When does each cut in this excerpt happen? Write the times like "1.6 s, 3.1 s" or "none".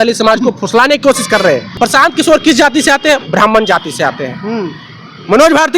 1.7 s

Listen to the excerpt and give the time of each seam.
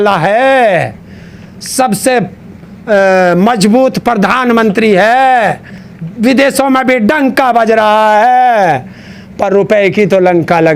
none

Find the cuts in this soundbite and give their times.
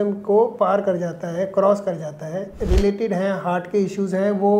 2.6 s

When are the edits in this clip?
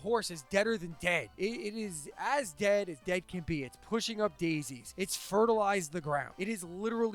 1.3 s, 4.8 s, 6.3 s

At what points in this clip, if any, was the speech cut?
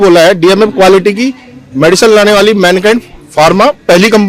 none

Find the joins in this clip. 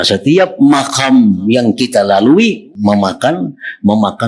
2.7 s

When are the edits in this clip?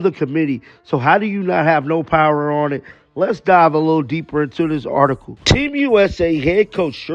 none

